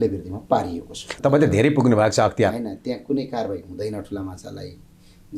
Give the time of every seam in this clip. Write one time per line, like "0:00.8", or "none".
0:01.0